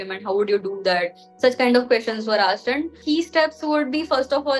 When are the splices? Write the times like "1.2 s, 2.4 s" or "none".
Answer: 3.0 s